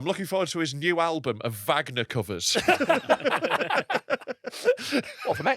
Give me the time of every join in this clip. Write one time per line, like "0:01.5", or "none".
none